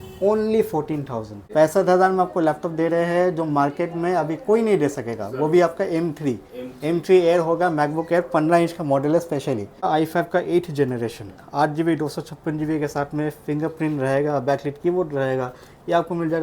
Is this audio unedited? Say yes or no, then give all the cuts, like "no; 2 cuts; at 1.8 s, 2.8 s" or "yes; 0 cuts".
no; 2 cuts; at 1.4 s, 9.9 s